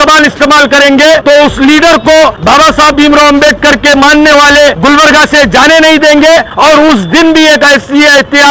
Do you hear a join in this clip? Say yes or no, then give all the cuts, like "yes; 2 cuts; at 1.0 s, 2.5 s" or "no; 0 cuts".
yes; 4 cuts; at 1.2 s, 2.4 s, 4.8 s, 6.5 s